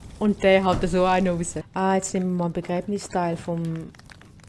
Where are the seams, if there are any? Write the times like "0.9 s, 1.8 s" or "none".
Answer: 1.6 s